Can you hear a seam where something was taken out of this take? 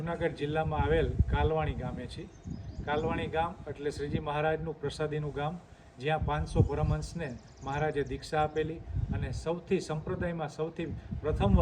no; 0 cuts

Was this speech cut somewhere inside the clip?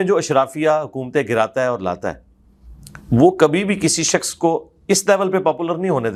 no; 0 cuts

